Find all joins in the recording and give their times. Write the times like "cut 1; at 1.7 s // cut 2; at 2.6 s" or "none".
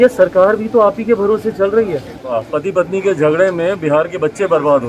cut 1; at 2.4 s